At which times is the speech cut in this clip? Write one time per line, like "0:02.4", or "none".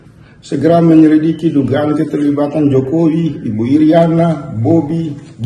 none